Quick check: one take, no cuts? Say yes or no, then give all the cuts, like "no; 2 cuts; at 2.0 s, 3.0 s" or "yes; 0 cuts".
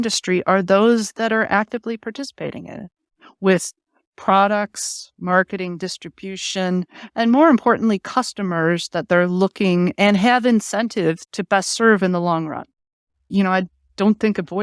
no; 1 cut; at 11.3 s